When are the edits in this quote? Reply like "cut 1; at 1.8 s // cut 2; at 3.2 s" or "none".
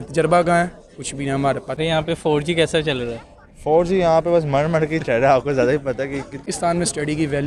cut 1; at 1.8 s // cut 2; at 6.4 s

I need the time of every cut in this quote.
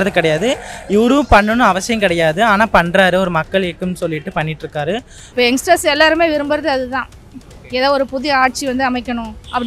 cut 1; at 5.2 s

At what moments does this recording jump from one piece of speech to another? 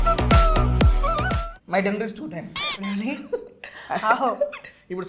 cut 1; at 1.4 s

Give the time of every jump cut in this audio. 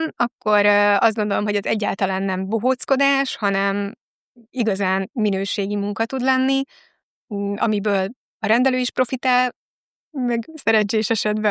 none

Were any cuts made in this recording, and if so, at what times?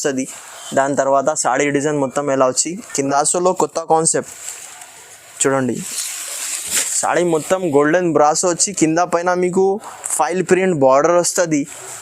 cut 1; at 3.1 s

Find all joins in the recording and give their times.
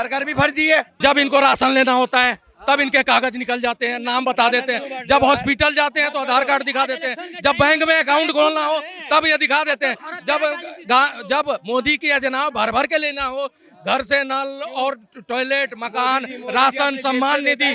cut 1; at 0.9 s

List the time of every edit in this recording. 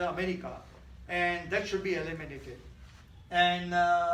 none

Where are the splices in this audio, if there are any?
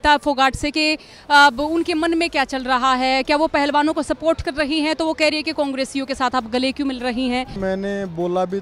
cut 1; at 7.6 s

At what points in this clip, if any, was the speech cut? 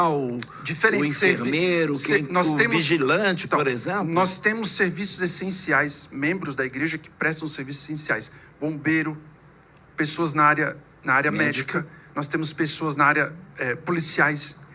none

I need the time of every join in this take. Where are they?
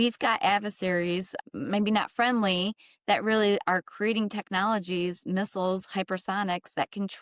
cut 1; at 1.3 s

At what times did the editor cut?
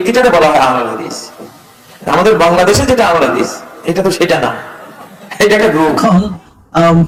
none

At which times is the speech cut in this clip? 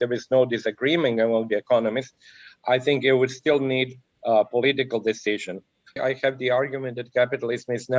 cut 1; at 6.0 s

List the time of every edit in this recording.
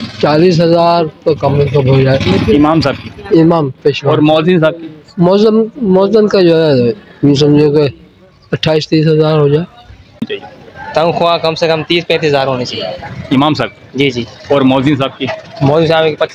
cut 1; at 10.2 s

